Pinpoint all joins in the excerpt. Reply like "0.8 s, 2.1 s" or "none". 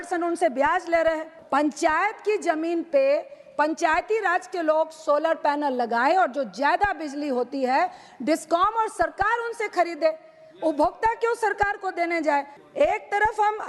1.3 s, 12.5 s